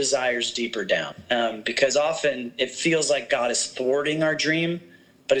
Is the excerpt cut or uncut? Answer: cut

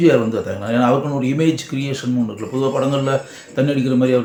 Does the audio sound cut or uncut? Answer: uncut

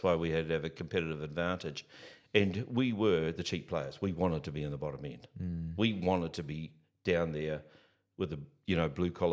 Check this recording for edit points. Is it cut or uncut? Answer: uncut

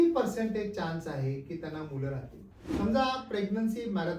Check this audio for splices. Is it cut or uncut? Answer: cut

